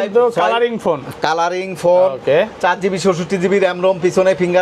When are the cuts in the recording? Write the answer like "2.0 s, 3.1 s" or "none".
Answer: none